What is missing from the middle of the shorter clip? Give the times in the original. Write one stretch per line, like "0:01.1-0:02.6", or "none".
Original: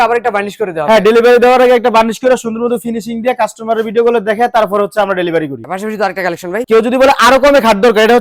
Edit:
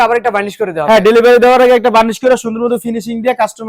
none

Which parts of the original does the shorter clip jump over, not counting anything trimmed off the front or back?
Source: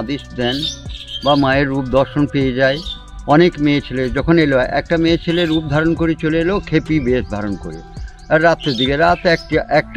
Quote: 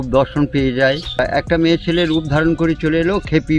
0:03.0-0:04.6

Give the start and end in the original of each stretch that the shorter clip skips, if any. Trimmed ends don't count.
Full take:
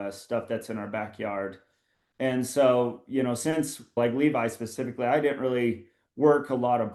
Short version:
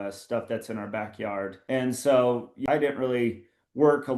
0:01.6-0:02.1
0:03.2-0:05.1

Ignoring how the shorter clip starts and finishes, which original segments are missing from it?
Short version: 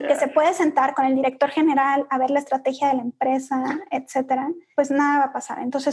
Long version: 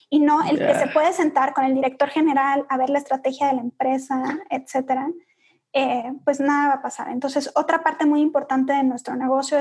0:05.2-0:06.1

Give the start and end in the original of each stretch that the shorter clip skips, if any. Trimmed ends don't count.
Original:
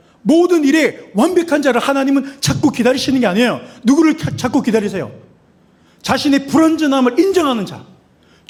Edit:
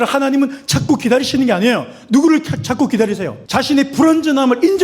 0:05.1-0:05.9

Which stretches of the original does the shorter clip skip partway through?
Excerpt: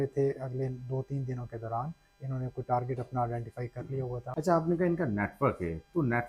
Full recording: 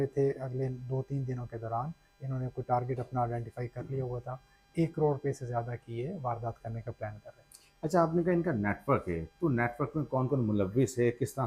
0:04.3-0:07.7

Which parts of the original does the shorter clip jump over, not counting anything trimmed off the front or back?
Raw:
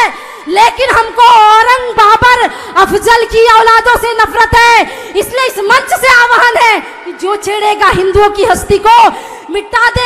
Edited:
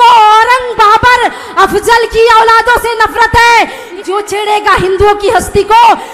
0:05.0-0:07.0

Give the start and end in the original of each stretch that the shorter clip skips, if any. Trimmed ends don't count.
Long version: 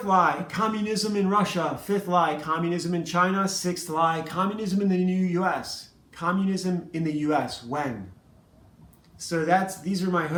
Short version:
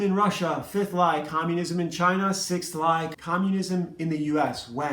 0:04.3-0:06.1

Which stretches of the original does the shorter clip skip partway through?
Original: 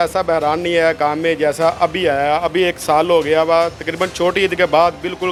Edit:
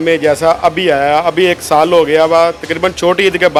none

